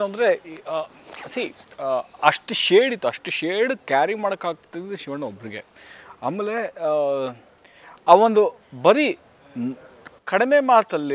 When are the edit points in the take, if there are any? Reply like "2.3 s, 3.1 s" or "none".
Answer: none